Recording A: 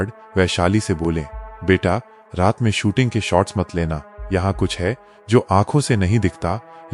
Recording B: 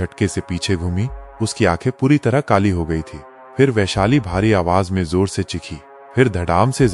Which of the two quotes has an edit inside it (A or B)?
B